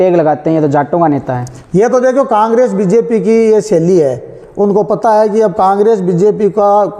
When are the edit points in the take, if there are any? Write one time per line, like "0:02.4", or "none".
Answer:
none